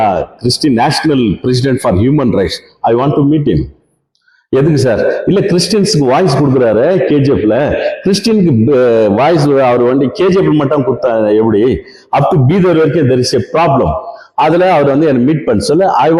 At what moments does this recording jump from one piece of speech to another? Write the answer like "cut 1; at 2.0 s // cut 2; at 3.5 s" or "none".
none

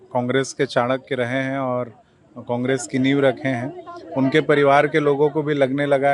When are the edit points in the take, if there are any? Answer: none

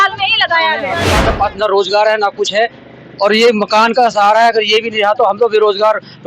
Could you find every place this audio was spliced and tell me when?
cut 1; at 1.0 s

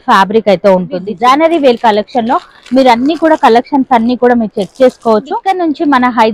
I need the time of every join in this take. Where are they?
cut 1; at 1.1 s // cut 2; at 5.3 s

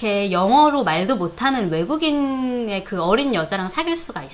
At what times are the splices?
none

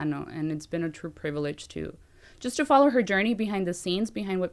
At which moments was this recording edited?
none

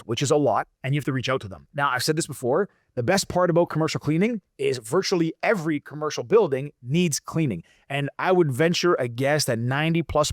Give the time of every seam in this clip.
none

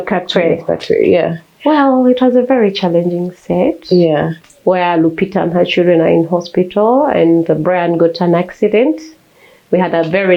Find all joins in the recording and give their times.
cut 1; at 4.4 s

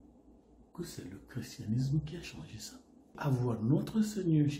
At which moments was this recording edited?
cut 1; at 3.2 s

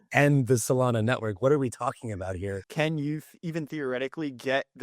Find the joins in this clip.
cut 1; at 2.6 s

